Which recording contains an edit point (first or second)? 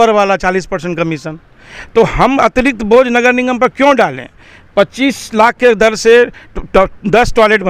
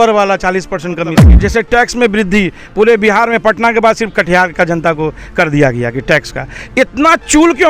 second